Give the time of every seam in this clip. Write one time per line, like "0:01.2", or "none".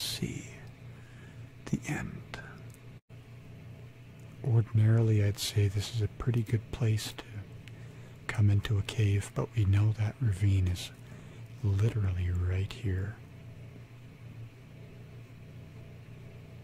0:03.0